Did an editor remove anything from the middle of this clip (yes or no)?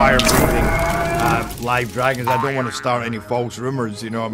no